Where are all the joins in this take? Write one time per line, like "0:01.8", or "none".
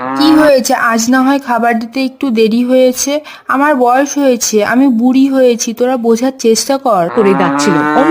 0:07.1